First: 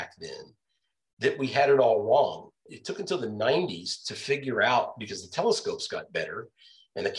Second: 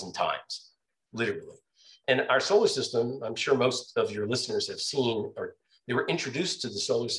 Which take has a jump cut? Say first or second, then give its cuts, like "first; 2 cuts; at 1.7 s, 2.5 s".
first; 1 cut; at 2.7 s